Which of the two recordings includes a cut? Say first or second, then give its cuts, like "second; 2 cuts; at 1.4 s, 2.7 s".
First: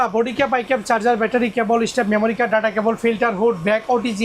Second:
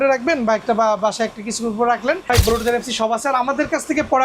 second; 1 cut; at 2.2 s